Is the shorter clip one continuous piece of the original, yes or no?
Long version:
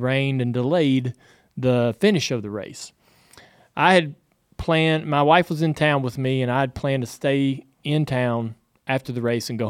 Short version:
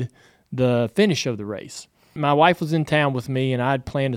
no